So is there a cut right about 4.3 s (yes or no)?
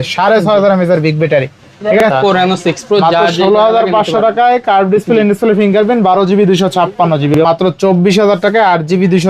no